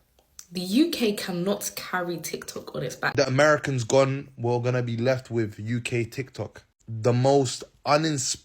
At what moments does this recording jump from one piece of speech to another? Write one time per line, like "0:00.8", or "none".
0:03.1